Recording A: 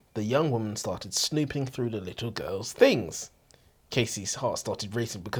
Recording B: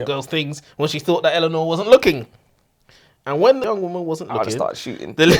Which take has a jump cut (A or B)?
B